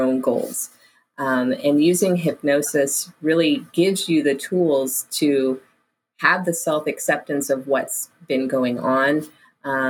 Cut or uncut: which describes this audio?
uncut